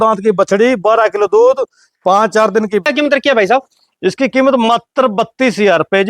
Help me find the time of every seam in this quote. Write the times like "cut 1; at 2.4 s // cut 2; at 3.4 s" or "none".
cut 1; at 2.8 s